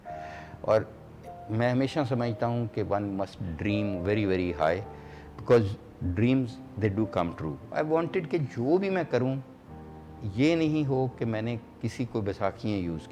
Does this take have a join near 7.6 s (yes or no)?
yes